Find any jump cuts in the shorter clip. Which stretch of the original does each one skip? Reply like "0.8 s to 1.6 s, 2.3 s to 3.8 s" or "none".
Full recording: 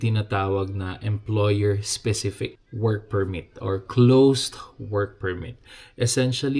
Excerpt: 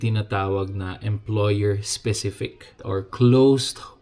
2.7 s to 3.4 s